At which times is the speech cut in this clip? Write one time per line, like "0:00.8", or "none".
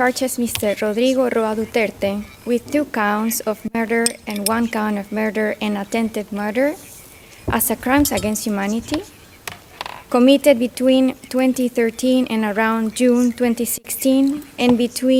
none